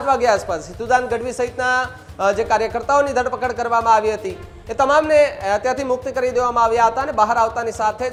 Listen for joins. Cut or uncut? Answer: uncut